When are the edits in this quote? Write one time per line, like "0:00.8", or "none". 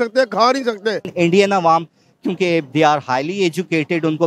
0:01.1